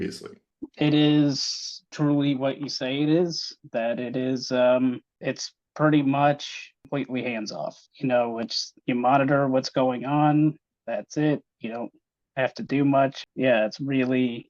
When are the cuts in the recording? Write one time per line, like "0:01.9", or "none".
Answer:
0:13.2

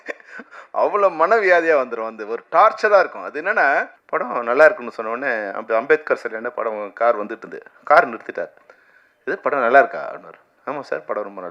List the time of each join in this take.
0:04.0

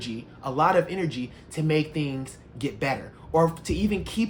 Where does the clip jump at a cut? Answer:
none

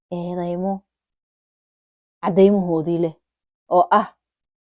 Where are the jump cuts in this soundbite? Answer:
none

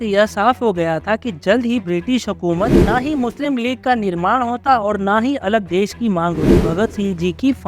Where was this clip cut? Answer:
0:02.8
0:06.6

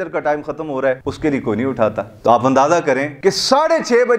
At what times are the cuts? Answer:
0:01.1
0:03.1

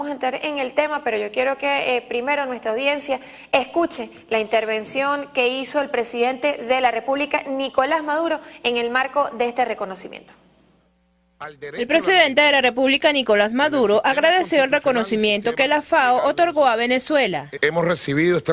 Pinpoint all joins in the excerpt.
0:04.0

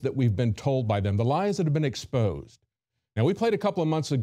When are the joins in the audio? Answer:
0:01.2

